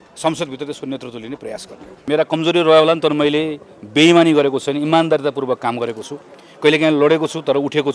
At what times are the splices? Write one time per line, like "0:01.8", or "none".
0:02.0